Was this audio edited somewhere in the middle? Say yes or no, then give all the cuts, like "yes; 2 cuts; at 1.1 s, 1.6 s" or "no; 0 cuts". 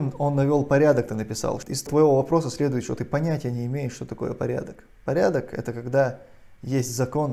yes; 1 cut; at 1.8 s